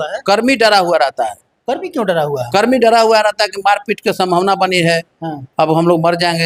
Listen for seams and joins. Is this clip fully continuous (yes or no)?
yes